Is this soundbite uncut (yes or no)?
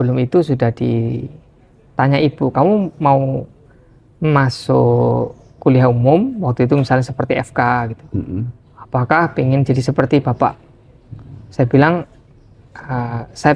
yes